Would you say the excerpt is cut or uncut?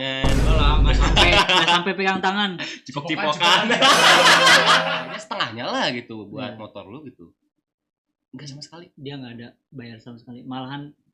cut